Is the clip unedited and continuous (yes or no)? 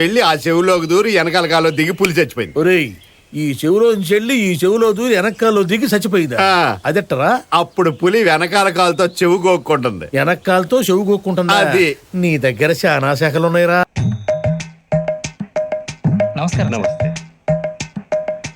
yes